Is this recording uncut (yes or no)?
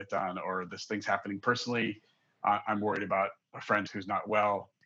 yes